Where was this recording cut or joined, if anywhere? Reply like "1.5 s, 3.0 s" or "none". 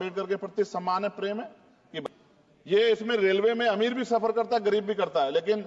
2.0 s